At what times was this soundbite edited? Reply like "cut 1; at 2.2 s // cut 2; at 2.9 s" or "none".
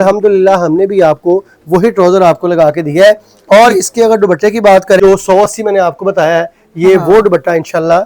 cut 1; at 5.0 s

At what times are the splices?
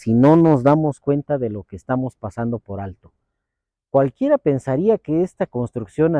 none

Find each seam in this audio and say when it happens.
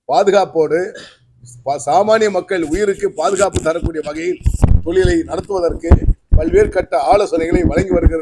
none

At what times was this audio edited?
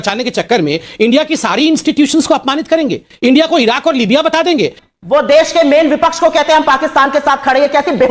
cut 1; at 4.8 s

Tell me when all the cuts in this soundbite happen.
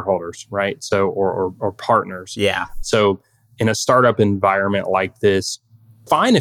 cut 1; at 2.7 s

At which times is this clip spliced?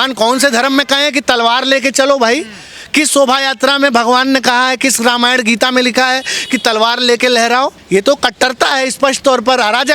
cut 1; at 7.8 s

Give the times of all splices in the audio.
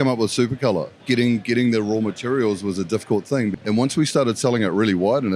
cut 1; at 0.9 s // cut 2; at 3.5 s

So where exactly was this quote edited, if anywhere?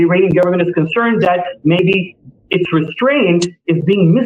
none

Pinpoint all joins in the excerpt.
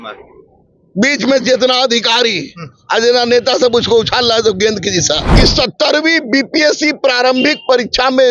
cut 1; at 5.3 s

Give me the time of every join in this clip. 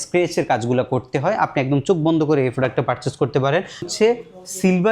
cut 1; at 3.9 s

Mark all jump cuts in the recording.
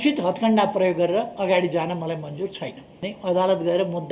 cut 1; at 3.0 s

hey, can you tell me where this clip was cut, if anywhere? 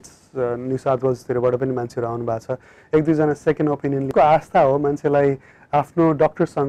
cut 1; at 4.1 s

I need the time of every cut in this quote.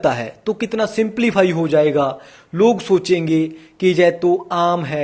none

